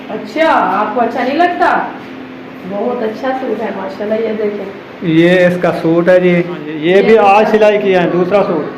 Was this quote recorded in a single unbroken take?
no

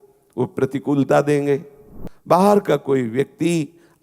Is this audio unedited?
no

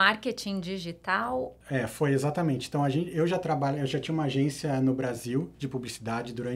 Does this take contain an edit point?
yes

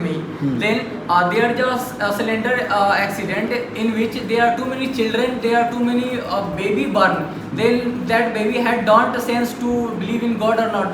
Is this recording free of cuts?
yes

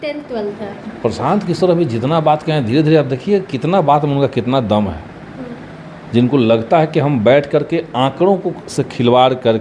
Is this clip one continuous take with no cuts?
yes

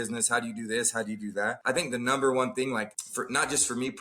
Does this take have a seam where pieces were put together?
yes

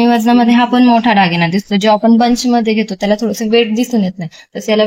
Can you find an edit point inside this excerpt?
no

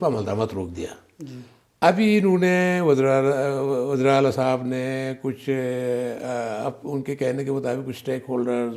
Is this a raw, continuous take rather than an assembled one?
yes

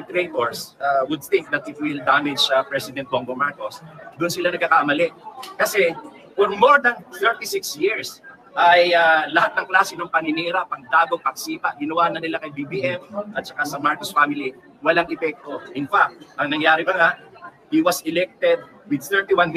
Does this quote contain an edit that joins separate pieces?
no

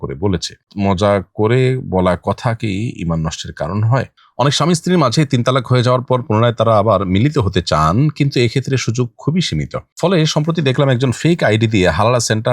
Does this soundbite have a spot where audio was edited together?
yes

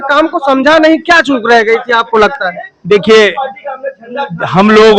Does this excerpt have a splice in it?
no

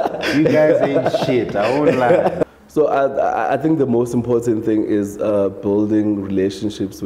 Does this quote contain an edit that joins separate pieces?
yes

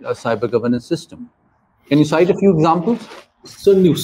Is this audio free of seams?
yes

